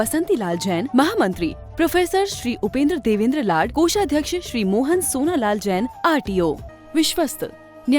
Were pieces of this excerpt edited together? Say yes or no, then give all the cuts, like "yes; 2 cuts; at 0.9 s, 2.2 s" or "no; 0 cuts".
yes; 1 cut; at 6.7 s